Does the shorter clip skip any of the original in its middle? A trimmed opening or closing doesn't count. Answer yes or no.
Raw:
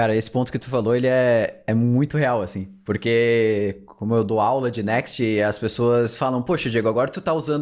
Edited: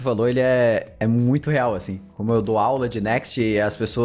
yes